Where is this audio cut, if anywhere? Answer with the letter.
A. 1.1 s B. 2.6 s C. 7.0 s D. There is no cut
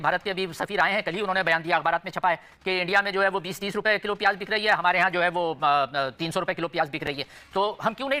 D